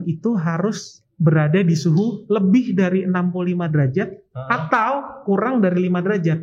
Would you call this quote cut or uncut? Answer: uncut